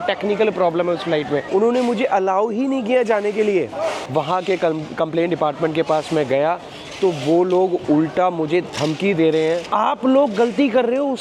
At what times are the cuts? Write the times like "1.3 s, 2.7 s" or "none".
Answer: 1.4 s, 4.0 s, 9.7 s